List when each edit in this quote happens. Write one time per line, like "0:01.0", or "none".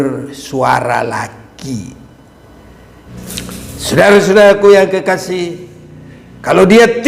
0:03.1

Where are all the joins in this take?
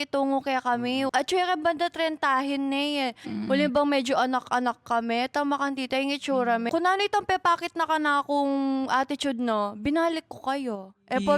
0:01.1
0:06.7

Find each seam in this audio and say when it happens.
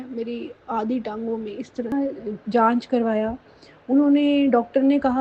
0:01.9

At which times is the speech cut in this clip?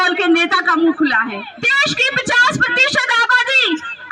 0:01.6

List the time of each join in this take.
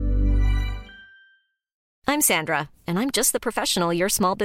0:01.8

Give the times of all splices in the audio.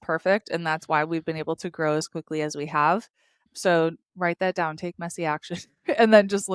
none

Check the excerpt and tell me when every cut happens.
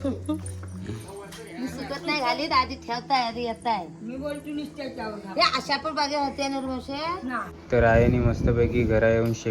0:07.5

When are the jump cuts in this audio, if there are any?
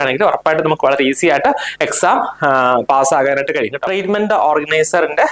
0:03.8

